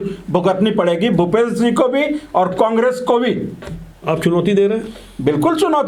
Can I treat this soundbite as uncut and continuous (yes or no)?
yes